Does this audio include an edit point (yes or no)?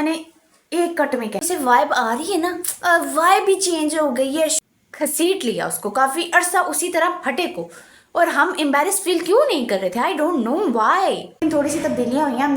yes